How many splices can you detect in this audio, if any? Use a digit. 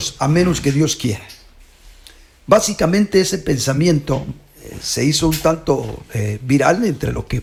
0